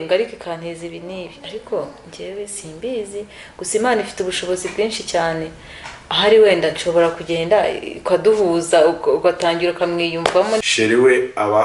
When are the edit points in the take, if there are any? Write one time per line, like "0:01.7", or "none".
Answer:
0:10.7